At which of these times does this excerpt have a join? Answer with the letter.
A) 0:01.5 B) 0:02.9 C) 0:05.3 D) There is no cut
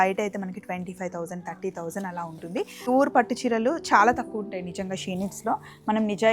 B